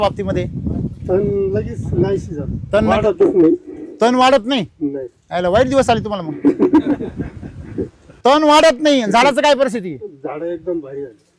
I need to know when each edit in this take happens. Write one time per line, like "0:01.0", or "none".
none

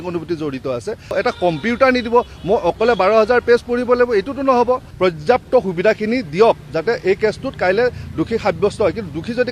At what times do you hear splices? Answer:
0:01.1
0:04.9

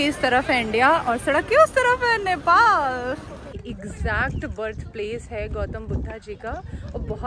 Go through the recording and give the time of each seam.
0:03.6

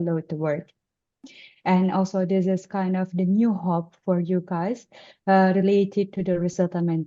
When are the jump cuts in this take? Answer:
0:01.4

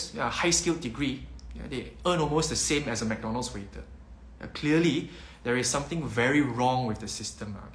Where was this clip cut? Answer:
none

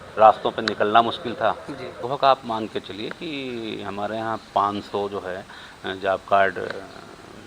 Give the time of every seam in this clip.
0:02.0

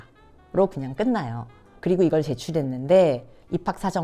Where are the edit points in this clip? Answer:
none

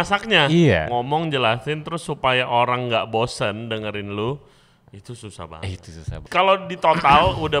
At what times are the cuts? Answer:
0:06.2

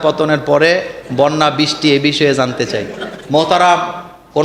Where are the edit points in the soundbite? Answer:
0:03.2

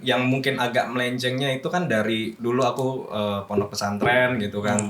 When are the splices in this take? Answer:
0:02.3

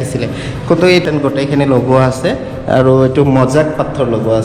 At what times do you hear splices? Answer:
0:01.0

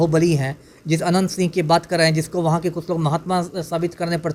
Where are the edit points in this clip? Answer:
none

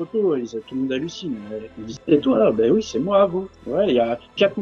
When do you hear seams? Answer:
none

